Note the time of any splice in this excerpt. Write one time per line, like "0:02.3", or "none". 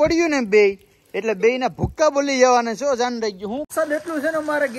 0:03.7